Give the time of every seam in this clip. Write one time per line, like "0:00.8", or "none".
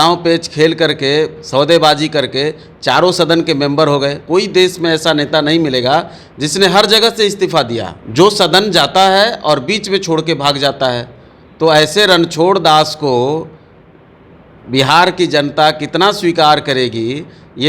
0:04.2